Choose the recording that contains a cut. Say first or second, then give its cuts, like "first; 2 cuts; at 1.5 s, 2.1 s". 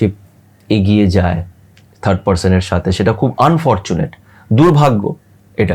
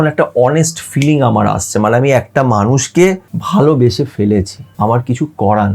second; 2 cuts; at 3.3 s, 4.6 s